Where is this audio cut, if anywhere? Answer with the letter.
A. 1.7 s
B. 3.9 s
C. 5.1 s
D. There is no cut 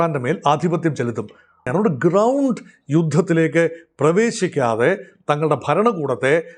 A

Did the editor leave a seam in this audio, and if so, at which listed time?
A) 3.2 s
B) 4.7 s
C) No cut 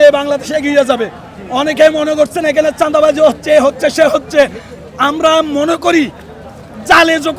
C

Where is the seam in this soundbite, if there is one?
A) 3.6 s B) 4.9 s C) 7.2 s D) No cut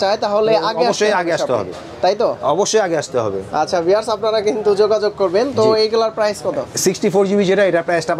D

